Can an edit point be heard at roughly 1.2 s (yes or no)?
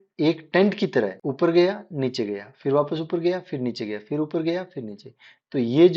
yes